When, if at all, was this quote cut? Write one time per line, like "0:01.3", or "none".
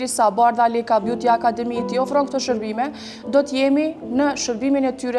none